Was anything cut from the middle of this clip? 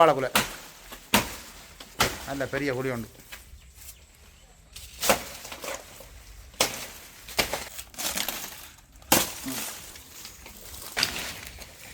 yes; 1 cut; at 7.7 s

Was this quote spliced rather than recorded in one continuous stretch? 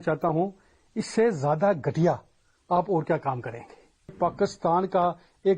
yes; 1 cut; at 4.1 s

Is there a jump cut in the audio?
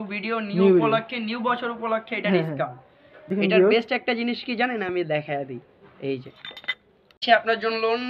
yes; 2 cuts; at 3.3 s, 7.1 s

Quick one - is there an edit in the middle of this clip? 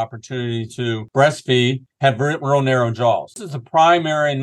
yes; 3 cuts; at 1.0 s, 1.9 s, 3.5 s

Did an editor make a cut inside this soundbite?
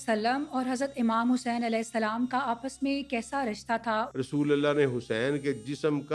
yes; 1 cut; at 4.1 s

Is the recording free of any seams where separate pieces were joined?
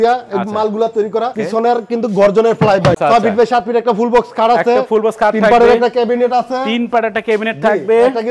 no; 2 cuts; at 1.4 s, 3.0 s

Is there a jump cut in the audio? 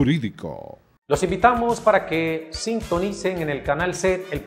yes; 1 cut; at 1.0 s

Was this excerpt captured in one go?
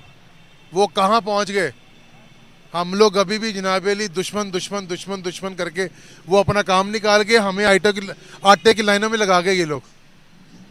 yes; 0 cuts

